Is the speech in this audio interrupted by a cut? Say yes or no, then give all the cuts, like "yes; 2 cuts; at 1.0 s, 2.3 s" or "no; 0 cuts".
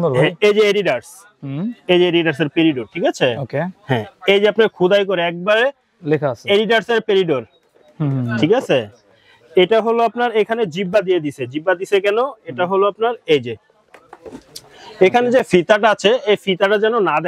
no; 0 cuts